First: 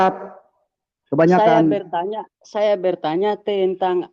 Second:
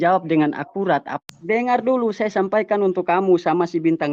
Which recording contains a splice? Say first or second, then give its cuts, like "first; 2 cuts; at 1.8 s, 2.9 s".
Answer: second; 1 cut; at 1.1 s